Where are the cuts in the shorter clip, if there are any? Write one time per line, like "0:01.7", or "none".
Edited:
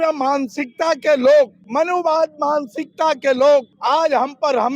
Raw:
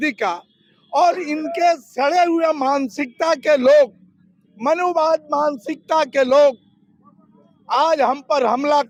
0:01.6
0:03.7